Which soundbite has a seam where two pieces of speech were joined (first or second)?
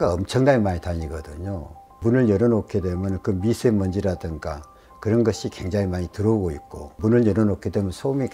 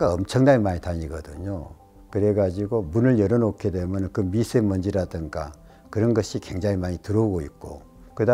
first